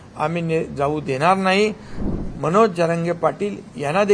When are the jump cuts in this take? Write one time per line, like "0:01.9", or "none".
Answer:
0:02.0

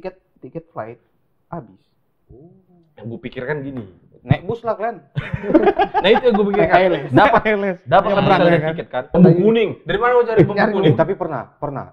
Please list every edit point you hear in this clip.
0:09.2

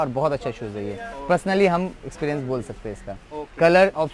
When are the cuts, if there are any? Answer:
none

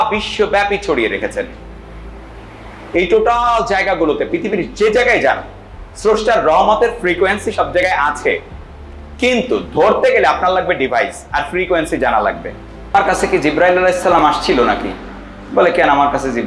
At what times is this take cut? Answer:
0:12.9

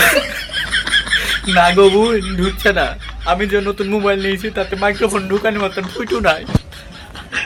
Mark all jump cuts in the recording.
none

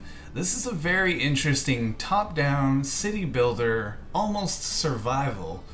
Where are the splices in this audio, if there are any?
none

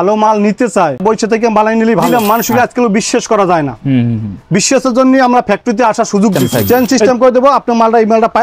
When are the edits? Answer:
0:01.0
0:02.1
0:06.4

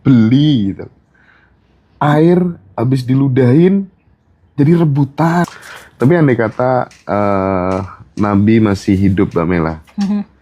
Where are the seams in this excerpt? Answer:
0:05.5

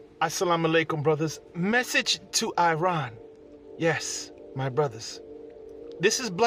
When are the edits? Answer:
none

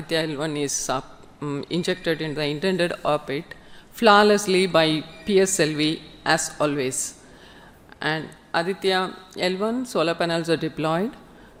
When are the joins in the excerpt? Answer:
none

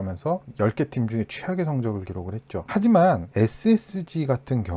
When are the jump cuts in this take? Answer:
0:02.7

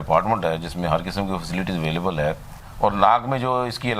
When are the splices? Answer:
0:02.6

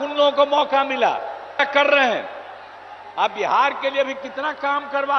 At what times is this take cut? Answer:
0:01.7

